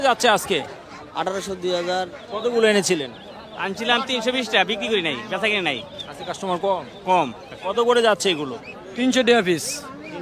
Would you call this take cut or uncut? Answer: cut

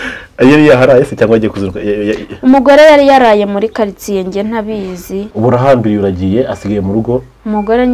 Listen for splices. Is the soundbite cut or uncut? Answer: cut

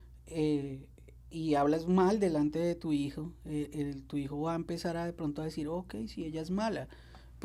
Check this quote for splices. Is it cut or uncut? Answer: uncut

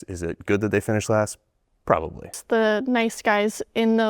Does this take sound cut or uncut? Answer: cut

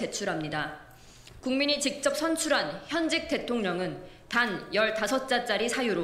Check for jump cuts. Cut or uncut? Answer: cut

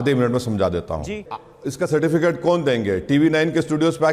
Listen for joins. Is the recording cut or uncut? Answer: cut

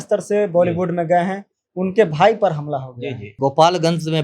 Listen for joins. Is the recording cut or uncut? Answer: cut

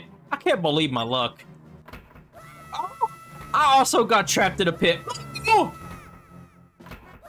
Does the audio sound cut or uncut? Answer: uncut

